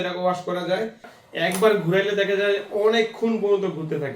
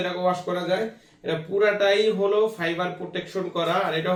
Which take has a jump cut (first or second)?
first